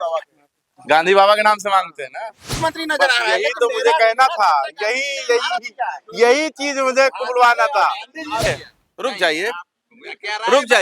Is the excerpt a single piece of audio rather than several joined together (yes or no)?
no